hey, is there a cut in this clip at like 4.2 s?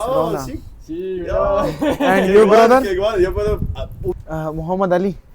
yes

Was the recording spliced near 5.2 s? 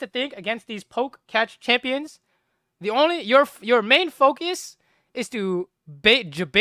no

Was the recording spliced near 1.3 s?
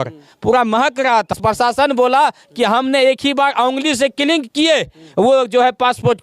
yes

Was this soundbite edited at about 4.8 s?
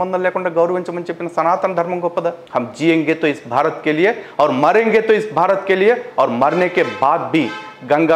no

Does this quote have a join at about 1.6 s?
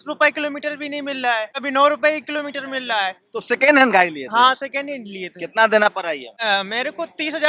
yes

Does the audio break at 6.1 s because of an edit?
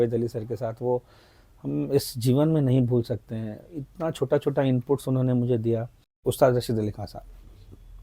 yes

